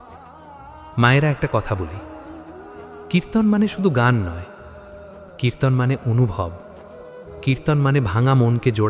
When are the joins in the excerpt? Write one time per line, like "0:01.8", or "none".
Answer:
0:00.9